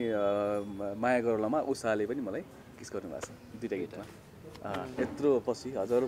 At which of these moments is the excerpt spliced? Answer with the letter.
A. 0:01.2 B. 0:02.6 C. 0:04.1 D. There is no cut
D